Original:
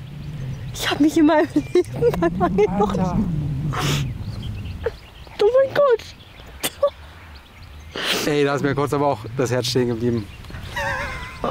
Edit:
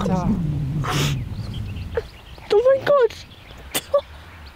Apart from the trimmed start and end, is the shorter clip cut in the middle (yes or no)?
no